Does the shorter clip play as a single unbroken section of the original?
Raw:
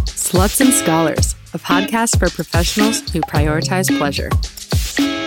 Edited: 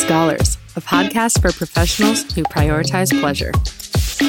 yes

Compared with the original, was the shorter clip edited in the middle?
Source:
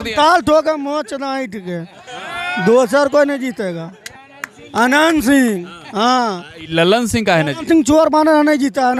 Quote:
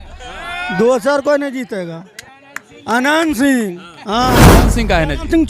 yes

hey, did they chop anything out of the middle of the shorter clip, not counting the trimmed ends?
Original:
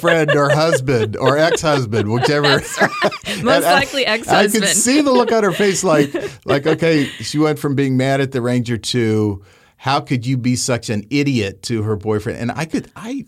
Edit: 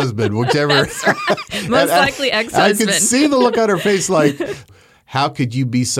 yes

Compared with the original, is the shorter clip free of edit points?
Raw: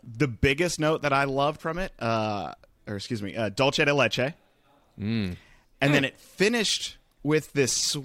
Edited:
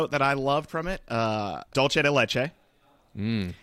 no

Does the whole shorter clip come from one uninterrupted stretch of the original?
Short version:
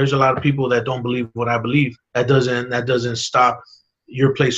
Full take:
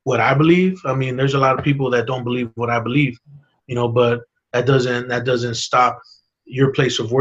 no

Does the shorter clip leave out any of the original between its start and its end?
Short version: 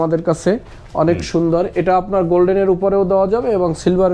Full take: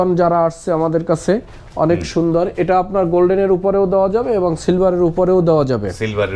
no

